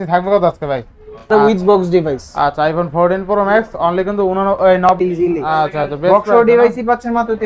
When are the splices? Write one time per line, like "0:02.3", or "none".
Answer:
0:01.3
0:05.0